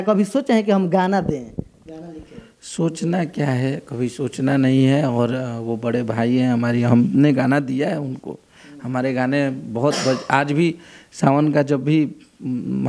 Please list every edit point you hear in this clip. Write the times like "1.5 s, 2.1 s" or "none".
none